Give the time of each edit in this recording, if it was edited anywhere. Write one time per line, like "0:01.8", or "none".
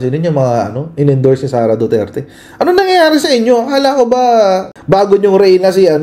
0:04.7